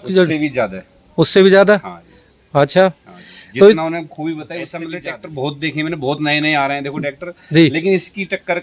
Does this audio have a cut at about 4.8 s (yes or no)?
yes